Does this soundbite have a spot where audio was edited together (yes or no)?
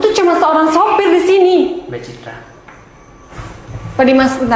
no